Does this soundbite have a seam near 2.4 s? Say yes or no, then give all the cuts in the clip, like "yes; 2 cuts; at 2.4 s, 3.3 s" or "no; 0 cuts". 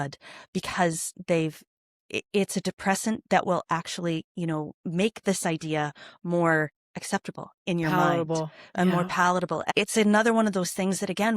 no; 1 cut; at 9.6 s